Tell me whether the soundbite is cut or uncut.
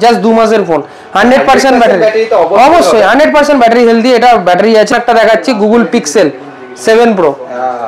cut